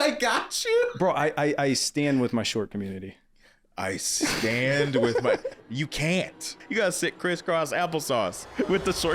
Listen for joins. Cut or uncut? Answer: cut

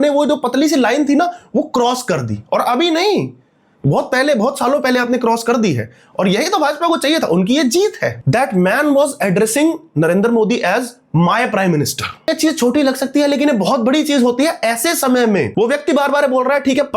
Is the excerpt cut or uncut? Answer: cut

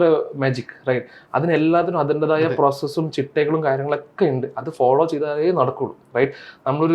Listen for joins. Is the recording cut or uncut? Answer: uncut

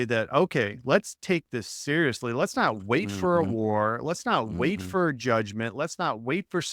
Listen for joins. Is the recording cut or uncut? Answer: uncut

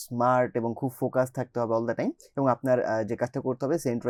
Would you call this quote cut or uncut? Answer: uncut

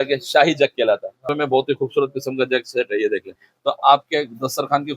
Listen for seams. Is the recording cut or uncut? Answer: cut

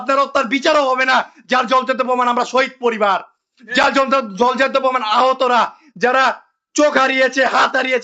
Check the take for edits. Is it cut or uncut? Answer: uncut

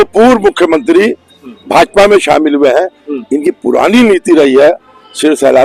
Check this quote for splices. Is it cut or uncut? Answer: uncut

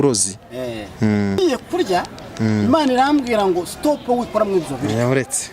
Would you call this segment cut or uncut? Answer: cut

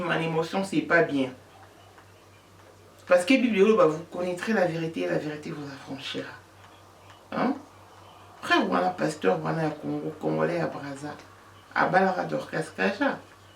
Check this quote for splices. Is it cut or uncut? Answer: uncut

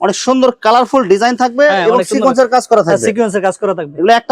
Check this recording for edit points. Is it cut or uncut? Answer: uncut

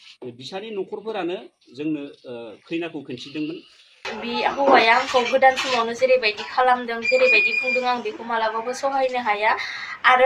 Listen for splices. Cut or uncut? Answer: cut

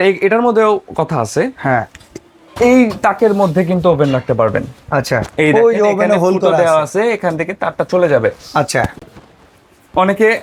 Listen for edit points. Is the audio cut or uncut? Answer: uncut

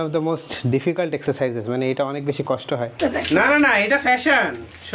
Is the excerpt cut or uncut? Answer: cut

